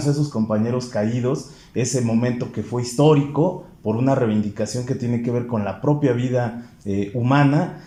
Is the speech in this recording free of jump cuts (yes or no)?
yes